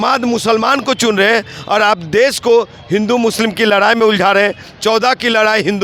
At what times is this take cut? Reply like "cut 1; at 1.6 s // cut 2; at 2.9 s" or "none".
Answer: none